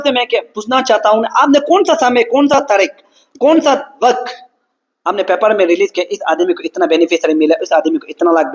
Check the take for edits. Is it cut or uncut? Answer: uncut